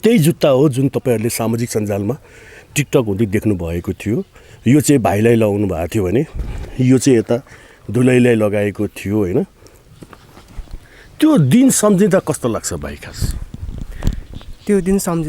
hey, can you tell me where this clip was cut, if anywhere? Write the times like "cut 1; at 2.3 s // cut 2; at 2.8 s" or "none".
none